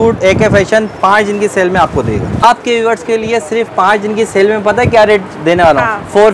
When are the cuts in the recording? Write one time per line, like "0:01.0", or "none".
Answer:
0:02.4